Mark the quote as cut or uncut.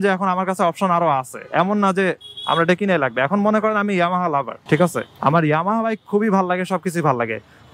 uncut